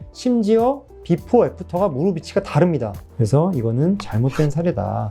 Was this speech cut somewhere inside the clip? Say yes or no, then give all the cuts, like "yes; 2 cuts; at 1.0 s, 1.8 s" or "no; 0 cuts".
yes; 1 cut; at 3.0 s